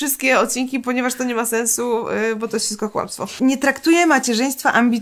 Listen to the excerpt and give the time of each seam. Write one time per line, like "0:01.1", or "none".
0:03.2